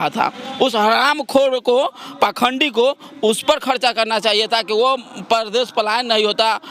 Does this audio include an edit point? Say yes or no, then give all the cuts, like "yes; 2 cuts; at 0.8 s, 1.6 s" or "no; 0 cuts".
no; 0 cuts